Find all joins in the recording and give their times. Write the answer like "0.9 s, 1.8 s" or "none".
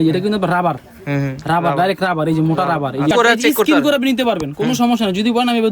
3.1 s

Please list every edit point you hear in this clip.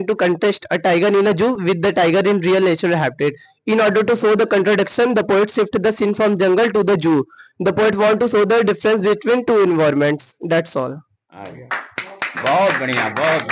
none

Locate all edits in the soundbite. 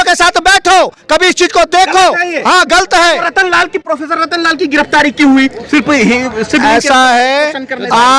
none

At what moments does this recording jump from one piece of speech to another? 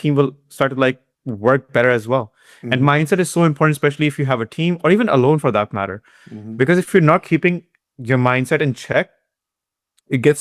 none

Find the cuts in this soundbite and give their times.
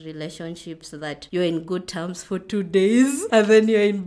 1.2 s, 3.2 s

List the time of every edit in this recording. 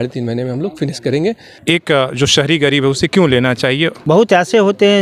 1.5 s, 4.0 s

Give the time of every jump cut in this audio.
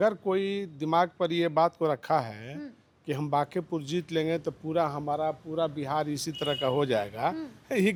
none

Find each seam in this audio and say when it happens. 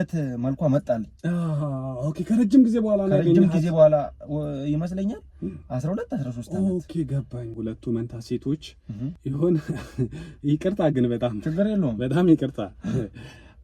7.4 s, 9.2 s

